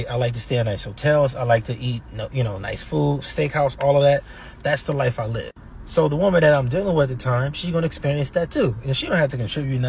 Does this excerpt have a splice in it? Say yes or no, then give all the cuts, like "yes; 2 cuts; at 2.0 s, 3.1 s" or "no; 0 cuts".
yes; 2 cuts; at 4.3 s, 8.9 s